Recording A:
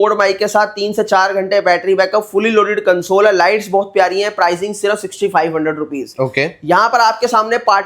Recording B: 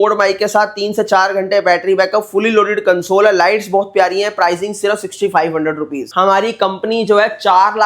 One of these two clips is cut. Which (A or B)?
B